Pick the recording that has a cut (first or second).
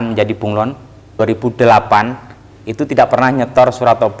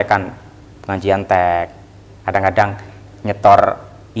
first